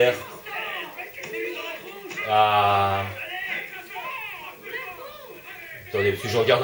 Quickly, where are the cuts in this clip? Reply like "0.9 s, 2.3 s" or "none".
none